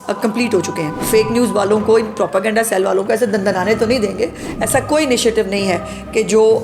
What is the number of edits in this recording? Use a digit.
2